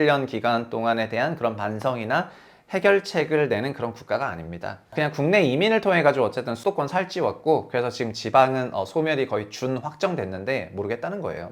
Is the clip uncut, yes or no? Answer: no